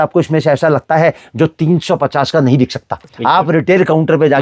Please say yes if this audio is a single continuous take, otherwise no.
no